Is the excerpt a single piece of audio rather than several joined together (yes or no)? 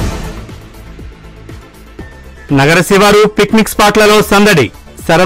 yes